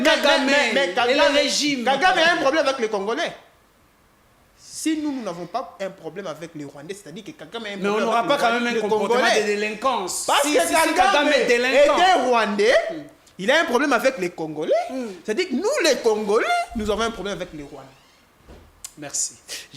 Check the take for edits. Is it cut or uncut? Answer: uncut